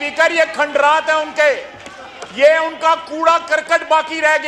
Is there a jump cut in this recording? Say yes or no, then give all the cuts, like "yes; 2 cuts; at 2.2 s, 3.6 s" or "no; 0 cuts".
no; 0 cuts